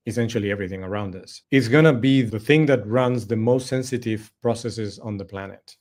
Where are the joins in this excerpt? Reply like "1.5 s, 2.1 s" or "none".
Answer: none

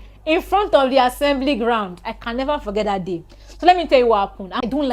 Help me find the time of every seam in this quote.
none

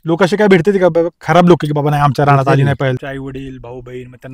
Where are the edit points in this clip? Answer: 3.0 s

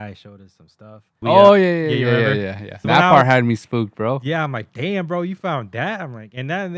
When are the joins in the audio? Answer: 1.2 s, 2.8 s

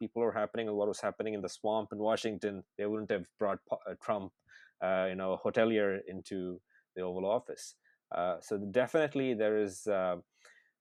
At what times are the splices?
none

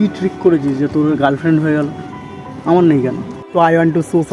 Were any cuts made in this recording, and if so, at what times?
3.3 s

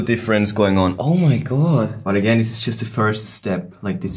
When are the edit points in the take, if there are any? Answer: 1.0 s, 2.0 s

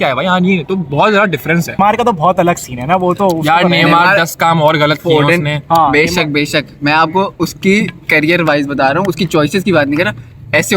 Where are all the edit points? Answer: 1.8 s

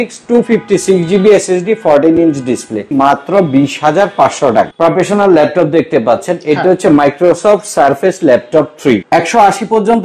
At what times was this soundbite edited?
2.8 s, 4.7 s, 9.0 s

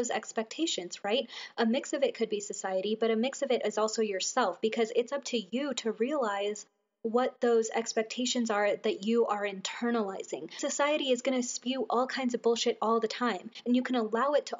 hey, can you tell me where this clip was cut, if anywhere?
10.6 s, 13.5 s

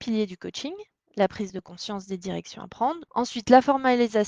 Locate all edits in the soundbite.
3.0 s

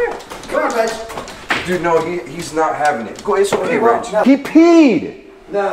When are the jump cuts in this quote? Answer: 4.2 s

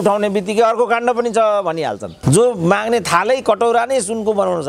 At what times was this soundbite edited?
2.2 s

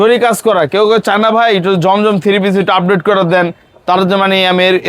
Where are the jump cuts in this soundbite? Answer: none

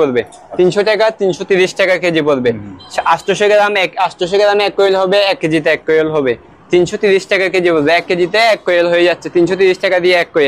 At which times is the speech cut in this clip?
none

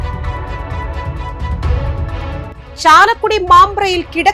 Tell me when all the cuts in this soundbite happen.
2.5 s

